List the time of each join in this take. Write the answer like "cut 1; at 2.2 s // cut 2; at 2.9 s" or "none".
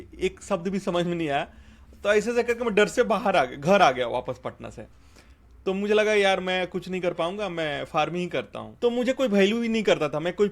cut 1; at 8.6 s